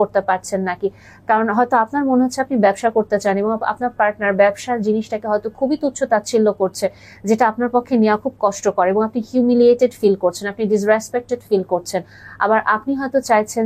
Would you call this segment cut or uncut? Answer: uncut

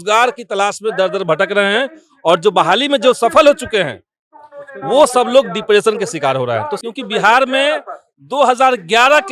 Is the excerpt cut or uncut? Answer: cut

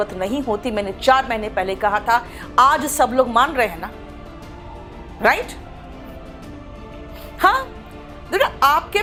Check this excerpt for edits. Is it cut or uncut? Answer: uncut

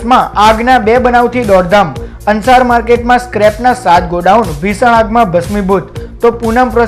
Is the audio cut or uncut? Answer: uncut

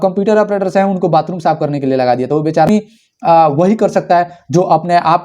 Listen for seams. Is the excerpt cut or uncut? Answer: cut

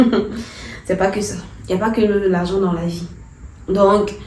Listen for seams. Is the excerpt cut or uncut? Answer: uncut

